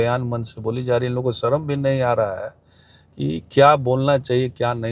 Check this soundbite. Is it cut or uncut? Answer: uncut